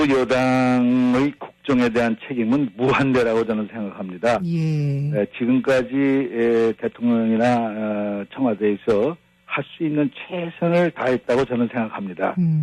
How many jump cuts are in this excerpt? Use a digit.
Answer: 0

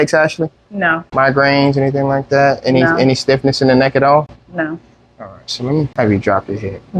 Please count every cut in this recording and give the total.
2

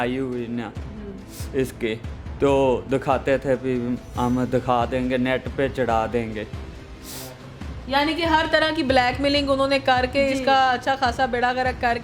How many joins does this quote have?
0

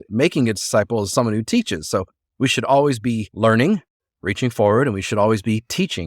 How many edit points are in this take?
1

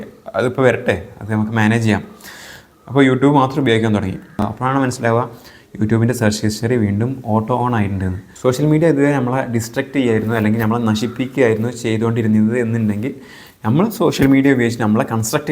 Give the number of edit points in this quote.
2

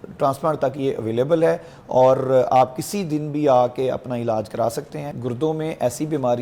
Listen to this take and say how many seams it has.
1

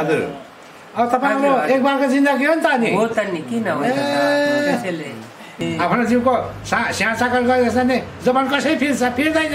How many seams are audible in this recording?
1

